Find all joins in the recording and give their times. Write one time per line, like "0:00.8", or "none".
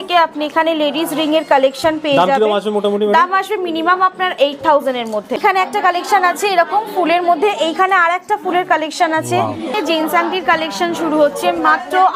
0:05.4
0:09.7